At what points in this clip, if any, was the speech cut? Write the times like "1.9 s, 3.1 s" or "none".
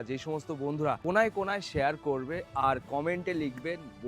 1.0 s